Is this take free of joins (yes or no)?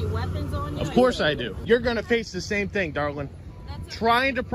no